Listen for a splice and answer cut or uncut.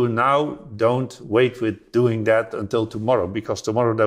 uncut